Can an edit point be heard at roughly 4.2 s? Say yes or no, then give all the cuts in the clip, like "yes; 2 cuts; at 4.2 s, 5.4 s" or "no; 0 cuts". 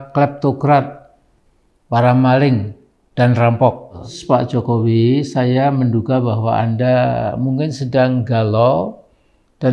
yes; 1 cut; at 4.2 s